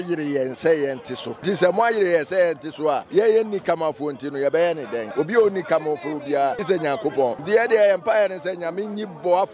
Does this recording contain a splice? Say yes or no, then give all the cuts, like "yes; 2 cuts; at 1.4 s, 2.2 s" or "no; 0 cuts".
yes; 5 cuts; at 1.3 s, 3.0 s, 5.0 s, 6.6 s, 7.4 s